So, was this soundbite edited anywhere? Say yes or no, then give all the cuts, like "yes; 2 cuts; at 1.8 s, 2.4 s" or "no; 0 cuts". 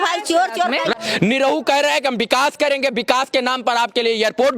yes; 1 cut; at 1.0 s